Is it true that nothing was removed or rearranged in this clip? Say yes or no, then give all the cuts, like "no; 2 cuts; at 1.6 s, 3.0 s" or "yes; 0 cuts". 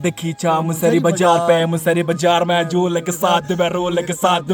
yes; 0 cuts